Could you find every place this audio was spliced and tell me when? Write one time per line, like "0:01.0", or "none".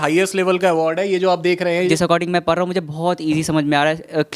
0:01.9